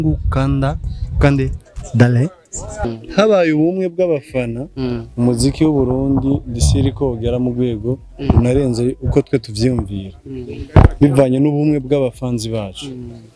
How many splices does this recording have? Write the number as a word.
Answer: one